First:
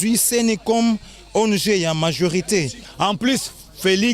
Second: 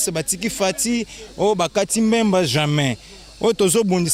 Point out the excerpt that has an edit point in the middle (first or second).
first